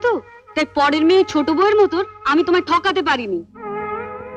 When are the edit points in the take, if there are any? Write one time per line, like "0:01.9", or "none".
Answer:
none